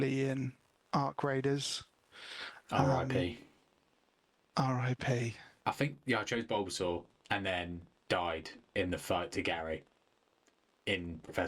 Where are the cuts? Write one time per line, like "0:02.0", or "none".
0:05.4